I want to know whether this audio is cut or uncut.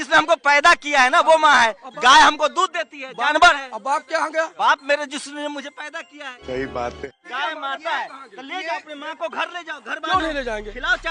cut